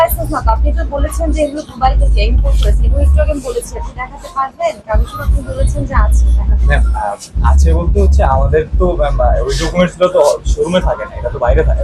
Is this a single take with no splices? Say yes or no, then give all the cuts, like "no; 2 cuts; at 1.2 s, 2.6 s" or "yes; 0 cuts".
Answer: yes; 0 cuts